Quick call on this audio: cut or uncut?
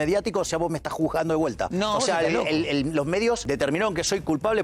cut